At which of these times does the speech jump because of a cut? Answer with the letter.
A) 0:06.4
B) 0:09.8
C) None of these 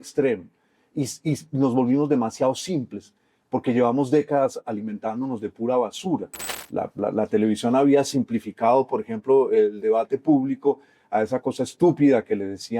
A